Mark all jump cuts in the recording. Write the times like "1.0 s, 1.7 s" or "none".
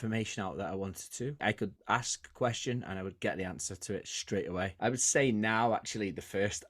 1.4 s, 4.7 s